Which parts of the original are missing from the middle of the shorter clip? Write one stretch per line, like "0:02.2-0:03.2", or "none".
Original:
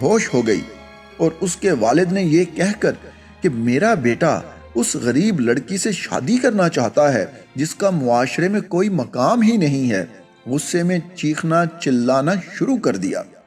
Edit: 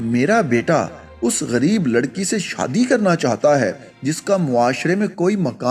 none